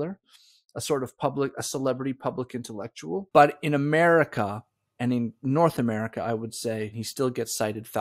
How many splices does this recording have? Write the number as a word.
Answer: two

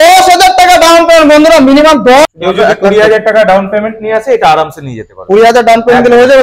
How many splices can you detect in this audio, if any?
one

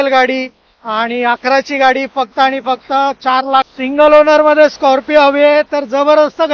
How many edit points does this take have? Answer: one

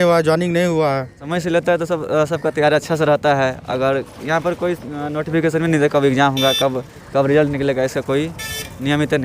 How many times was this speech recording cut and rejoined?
one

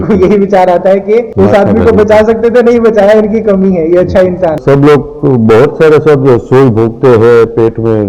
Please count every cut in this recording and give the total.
one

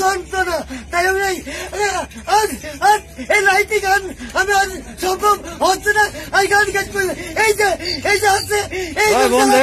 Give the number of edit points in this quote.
zero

